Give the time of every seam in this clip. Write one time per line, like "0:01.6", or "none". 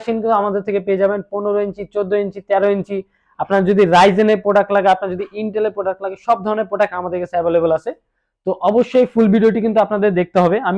none